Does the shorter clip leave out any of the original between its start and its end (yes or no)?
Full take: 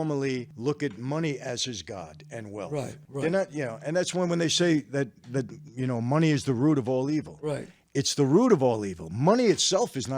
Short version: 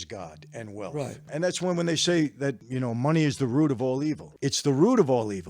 yes